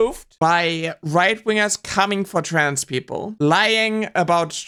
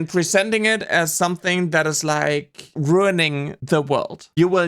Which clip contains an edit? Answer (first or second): second